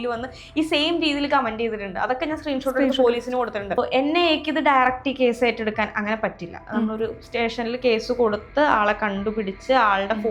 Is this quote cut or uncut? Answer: cut